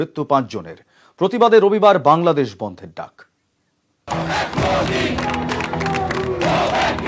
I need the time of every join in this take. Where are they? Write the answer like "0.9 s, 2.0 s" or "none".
4.1 s

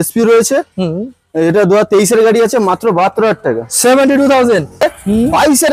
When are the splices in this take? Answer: 4.8 s

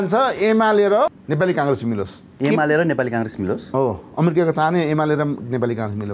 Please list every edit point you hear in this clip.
1.2 s, 2.2 s

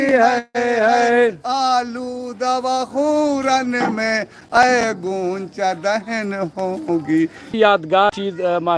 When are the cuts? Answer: 7.5 s

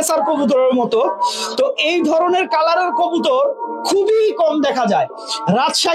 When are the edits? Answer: none

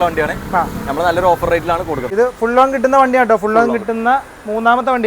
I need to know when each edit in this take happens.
2.1 s

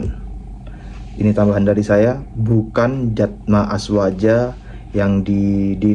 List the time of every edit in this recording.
none

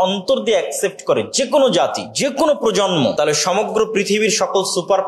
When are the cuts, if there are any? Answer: 2.0 s, 3.1 s

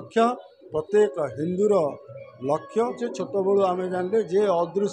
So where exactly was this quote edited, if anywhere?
3.0 s

